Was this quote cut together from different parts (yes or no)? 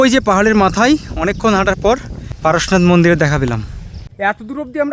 no